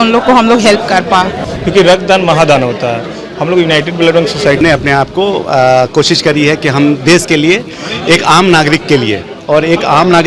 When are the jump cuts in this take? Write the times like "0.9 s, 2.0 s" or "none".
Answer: 1.4 s, 4.6 s